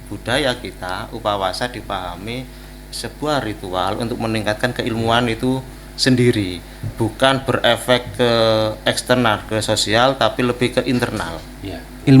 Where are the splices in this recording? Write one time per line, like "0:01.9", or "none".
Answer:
none